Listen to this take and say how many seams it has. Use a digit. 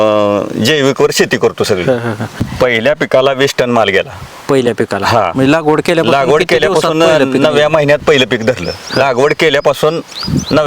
1